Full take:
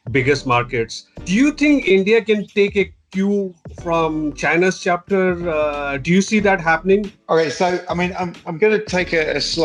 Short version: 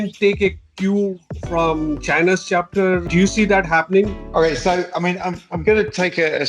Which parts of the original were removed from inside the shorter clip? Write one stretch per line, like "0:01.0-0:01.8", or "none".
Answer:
0:05.4-0:06.0